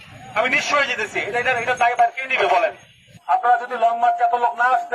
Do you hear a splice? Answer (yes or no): yes